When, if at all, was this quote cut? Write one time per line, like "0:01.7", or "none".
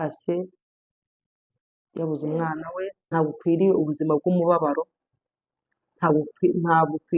0:03.1

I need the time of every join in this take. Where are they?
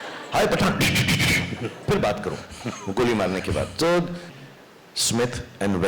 0:04.3

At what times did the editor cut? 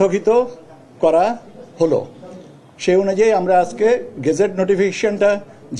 none

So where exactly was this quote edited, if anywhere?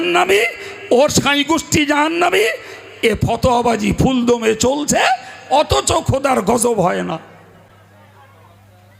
none

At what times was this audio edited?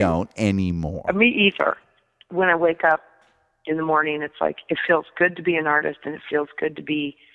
0:01.9

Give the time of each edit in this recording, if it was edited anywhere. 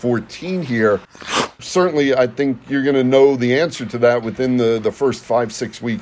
0:01.5

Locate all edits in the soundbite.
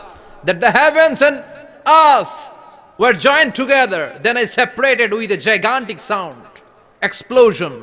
none

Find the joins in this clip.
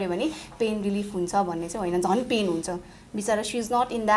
none

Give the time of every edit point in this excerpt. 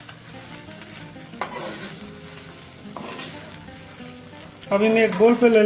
none

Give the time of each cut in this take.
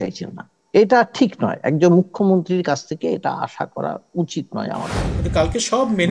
0:05.0

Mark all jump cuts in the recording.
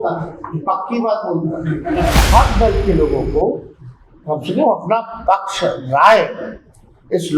0:02.2

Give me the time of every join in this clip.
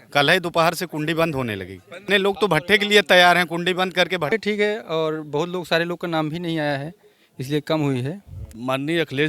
0:02.0
0:04.3
0:08.5

